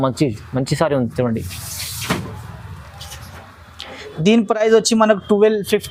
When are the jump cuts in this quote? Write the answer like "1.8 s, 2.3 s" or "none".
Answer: none